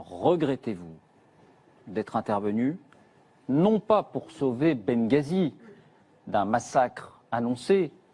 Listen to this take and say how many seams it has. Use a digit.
1